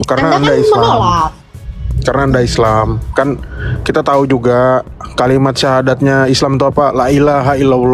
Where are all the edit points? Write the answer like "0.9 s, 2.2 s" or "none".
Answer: none